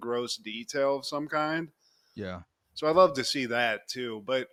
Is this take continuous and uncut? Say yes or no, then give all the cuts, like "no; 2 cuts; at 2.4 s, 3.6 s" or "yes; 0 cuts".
yes; 0 cuts